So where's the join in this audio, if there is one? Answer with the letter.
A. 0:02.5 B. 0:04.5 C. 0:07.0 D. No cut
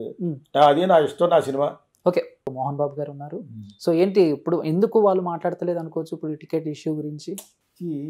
A